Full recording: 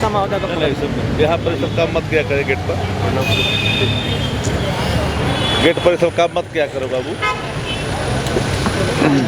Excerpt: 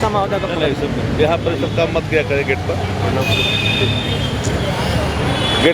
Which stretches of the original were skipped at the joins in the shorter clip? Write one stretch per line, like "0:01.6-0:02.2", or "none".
none